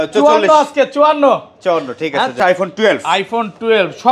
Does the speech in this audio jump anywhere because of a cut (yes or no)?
yes